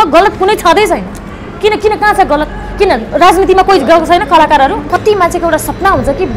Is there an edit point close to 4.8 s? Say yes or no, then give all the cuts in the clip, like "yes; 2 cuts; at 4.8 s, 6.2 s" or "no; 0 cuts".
yes; 1 cut; at 4.8 s